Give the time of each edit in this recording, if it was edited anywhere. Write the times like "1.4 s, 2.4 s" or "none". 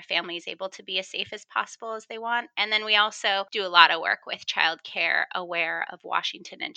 3.5 s